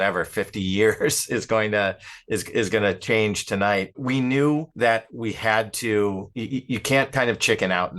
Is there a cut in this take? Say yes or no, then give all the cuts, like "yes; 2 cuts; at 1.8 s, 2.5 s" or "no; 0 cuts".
yes; 3 cuts; at 4.0 s, 4.7 s, 6.3 s